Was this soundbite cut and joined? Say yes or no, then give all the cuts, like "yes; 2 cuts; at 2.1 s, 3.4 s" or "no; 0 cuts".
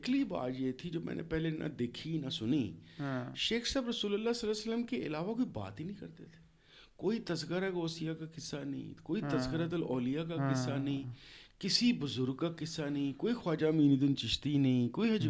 no; 0 cuts